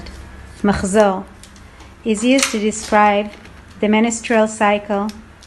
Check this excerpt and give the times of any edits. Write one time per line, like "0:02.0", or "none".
none